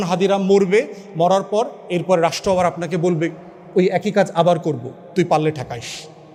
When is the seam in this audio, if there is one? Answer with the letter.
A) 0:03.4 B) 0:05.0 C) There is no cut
C